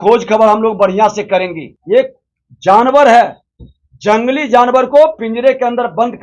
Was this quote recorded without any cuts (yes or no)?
no